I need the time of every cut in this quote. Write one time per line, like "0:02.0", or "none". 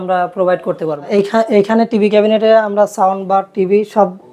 0:01.1